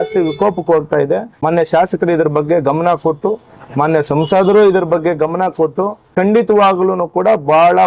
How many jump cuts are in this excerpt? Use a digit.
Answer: 2